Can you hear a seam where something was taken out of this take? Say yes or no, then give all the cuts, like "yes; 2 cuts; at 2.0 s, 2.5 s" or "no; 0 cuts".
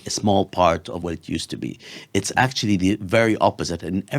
yes; 1 cut; at 1.0 s